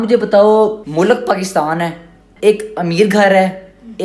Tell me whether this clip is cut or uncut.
cut